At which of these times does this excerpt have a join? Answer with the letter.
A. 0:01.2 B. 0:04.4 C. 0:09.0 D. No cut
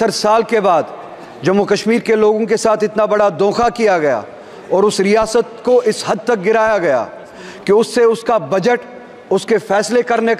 D